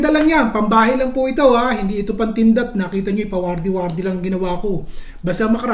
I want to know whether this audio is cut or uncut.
uncut